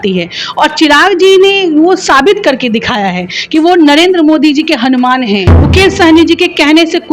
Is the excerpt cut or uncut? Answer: cut